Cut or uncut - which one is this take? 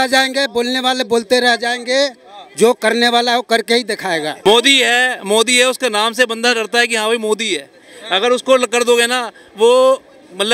cut